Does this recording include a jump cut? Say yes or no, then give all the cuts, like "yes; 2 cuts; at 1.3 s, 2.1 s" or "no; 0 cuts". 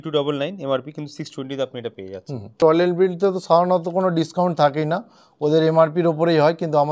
yes; 1 cut; at 2.6 s